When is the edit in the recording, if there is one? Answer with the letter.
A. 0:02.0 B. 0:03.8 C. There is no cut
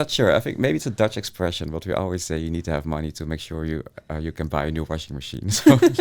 C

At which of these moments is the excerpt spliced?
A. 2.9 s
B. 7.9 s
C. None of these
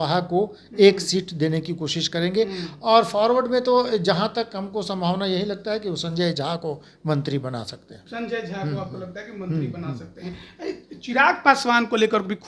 C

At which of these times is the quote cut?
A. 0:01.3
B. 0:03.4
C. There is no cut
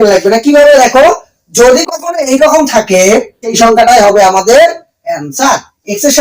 B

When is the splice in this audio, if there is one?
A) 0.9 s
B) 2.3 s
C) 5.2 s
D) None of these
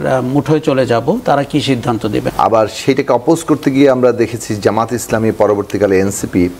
B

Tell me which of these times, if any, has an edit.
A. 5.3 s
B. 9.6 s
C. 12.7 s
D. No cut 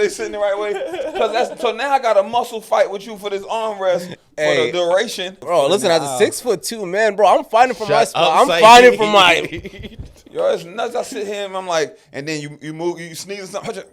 A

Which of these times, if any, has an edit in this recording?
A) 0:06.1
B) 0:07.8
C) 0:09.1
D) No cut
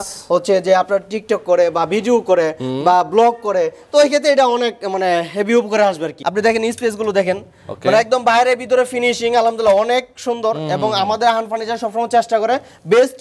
A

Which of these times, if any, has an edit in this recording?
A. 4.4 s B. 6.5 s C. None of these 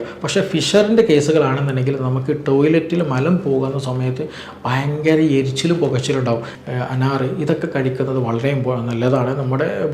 B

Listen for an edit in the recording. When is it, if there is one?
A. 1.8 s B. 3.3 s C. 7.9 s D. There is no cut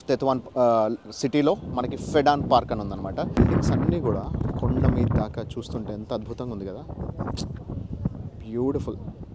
B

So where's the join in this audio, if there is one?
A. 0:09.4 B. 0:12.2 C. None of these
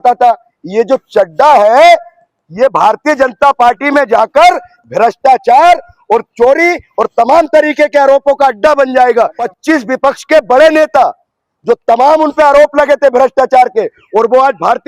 A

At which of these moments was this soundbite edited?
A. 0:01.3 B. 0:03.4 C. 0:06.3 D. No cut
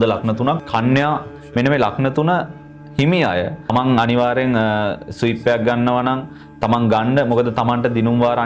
A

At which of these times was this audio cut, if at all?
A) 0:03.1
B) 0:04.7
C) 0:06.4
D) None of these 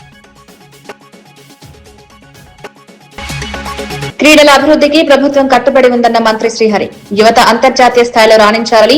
A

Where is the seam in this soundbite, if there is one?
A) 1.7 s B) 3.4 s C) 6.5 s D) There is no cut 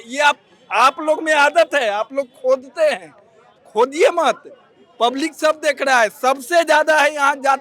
D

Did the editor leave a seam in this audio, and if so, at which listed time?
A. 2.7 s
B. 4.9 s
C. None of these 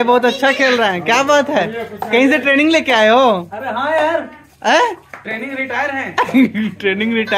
C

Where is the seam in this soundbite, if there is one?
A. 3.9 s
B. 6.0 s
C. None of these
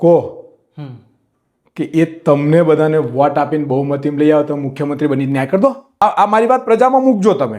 B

